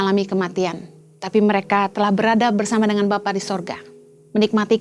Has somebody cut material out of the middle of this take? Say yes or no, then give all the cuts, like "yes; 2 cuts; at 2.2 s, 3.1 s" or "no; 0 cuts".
no; 0 cuts